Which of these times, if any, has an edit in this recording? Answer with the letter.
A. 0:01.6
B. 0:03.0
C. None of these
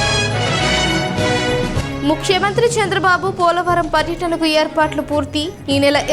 A